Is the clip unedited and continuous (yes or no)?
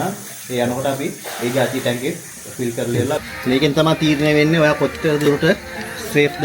no